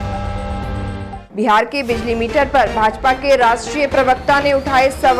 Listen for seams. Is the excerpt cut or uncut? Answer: cut